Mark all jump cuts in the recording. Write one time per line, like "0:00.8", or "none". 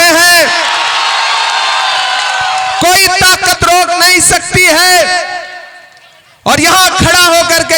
none